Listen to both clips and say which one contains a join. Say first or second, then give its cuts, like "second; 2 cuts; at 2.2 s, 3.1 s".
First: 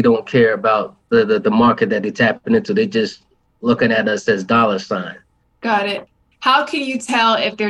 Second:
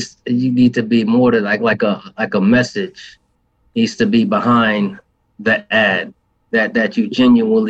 first; 1 cut; at 5.5 s